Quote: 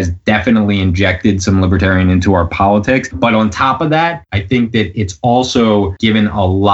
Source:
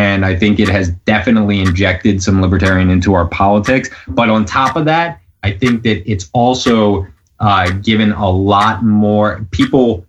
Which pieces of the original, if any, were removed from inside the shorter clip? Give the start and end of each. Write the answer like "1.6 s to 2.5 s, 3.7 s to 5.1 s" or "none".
3.9 s to 4.0 s, 5.2 s to 5.4 s, 7.0 s to 7.8 s